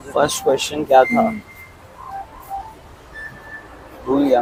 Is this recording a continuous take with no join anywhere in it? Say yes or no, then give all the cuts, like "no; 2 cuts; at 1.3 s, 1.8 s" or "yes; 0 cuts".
yes; 0 cuts